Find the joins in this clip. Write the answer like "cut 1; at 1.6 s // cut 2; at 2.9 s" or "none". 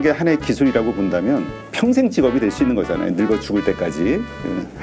cut 1; at 1.7 s